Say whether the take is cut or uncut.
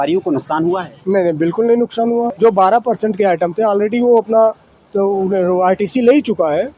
cut